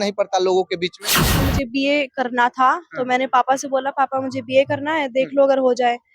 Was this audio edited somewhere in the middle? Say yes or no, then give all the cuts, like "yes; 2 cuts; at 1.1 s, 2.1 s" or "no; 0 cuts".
yes; 1 cut; at 1.3 s